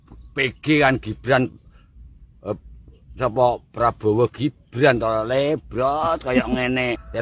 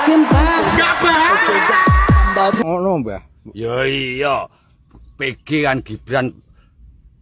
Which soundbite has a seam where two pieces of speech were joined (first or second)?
second